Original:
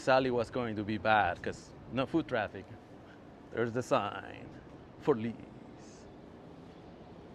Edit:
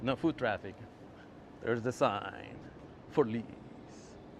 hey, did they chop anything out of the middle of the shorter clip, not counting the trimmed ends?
no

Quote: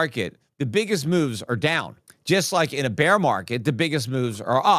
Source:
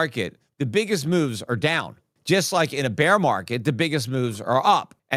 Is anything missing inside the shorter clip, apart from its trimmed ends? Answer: no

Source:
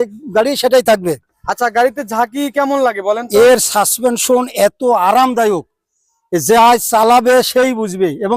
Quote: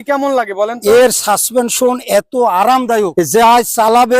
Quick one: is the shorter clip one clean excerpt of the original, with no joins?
no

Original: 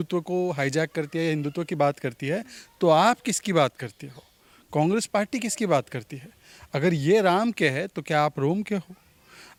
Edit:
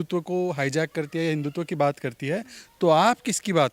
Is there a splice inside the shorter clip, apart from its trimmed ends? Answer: no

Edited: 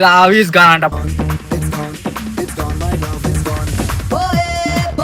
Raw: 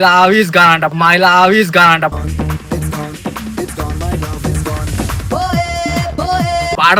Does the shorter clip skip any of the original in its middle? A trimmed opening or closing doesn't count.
yes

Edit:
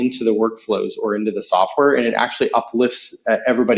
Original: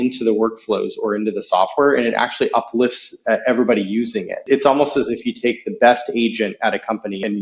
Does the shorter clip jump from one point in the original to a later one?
no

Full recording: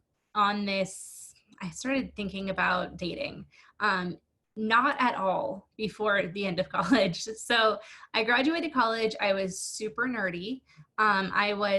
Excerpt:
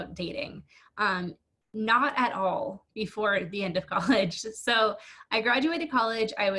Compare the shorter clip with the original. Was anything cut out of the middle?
no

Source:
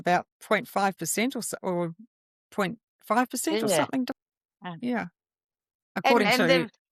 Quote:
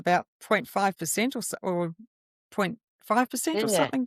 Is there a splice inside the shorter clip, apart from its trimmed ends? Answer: no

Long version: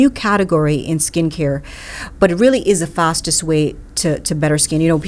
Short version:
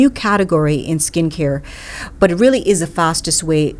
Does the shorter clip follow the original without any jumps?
yes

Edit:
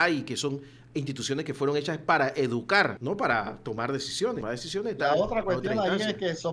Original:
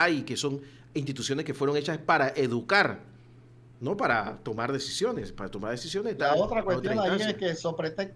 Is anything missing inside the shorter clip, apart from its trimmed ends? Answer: yes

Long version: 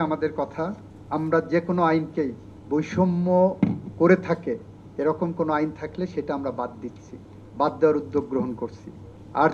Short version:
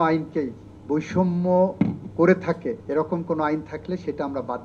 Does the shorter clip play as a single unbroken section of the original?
no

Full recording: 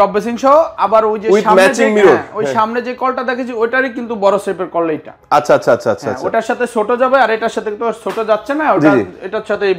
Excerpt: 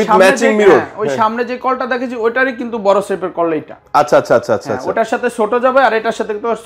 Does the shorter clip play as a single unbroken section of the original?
yes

